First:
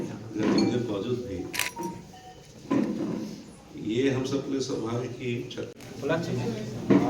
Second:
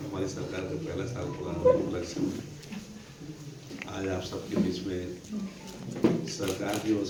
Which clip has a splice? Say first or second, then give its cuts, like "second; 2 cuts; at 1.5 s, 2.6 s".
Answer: first; 1 cut; at 5.7 s